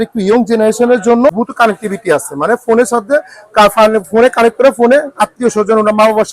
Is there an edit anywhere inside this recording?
yes; 1 cut; at 1.3 s

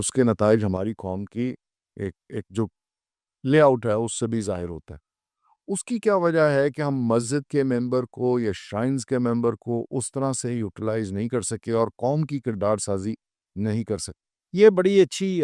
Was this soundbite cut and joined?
no; 0 cuts

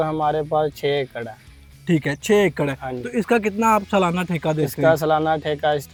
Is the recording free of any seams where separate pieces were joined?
yes; 0 cuts

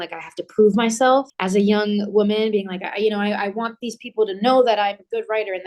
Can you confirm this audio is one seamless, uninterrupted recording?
no; 1 cut; at 1.4 s

